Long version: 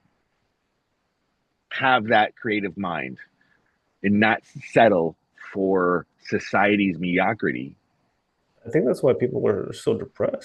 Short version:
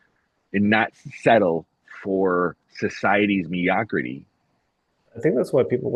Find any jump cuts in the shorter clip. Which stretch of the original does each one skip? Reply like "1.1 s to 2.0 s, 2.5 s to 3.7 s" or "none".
none